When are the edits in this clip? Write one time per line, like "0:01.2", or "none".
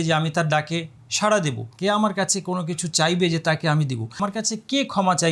0:01.7
0:04.2